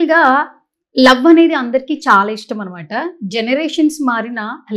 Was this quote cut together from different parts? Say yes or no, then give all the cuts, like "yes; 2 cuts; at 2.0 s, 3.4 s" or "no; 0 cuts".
no; 0 cuts